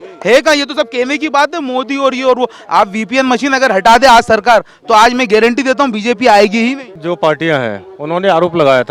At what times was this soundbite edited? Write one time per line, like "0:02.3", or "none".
0:06.9